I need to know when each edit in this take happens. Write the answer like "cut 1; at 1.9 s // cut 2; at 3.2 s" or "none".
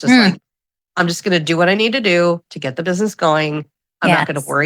none